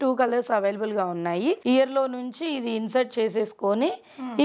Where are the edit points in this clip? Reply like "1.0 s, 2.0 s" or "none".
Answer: 1.6 s